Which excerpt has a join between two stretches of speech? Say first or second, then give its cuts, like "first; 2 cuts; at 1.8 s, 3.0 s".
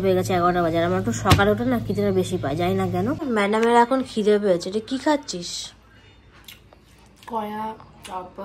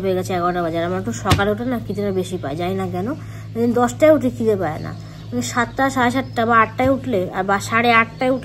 first; 1 cut; at 3.2 s